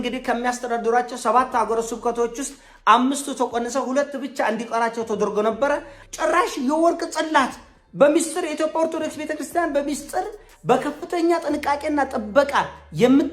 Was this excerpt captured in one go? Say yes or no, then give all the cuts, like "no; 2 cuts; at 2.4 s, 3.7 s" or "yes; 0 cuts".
no; 1 cut; at 6.0 s